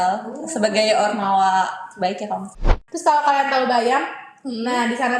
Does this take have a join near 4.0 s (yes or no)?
no